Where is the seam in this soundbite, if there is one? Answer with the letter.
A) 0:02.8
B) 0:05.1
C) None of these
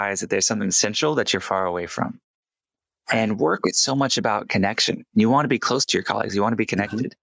C